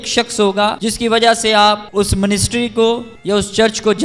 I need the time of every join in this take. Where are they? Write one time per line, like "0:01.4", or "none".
0:00.8
0:01.9
0:03.1